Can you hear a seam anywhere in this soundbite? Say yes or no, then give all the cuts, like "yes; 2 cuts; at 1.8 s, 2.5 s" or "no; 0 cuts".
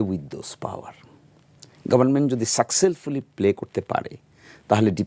no; 0 cuts